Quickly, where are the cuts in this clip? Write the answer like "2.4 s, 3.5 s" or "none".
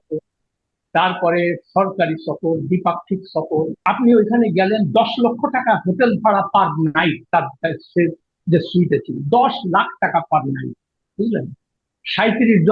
3.8 s